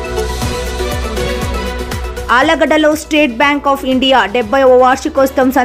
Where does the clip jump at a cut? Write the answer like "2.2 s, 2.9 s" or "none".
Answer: 2.2 s